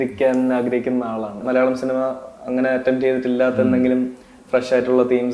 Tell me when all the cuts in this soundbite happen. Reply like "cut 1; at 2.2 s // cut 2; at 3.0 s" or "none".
cut 1; at 1.4 s